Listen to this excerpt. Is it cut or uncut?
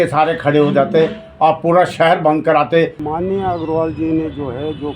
cut